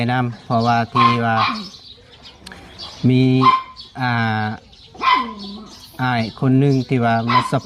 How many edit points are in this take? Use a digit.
0